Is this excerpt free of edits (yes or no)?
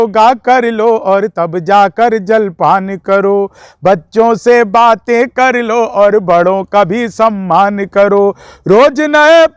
yes